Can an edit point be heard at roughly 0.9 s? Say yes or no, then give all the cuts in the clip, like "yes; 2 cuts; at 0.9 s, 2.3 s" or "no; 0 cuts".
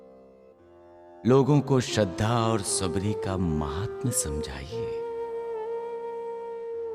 yes; 1 cut; at 0.9 s